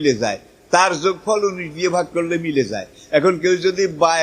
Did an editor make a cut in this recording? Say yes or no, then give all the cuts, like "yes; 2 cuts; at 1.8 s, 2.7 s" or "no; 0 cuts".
no; 0 cuts